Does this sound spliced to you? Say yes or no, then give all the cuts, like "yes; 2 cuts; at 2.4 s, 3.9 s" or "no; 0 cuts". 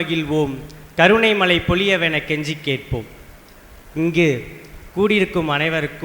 no; 0 cuts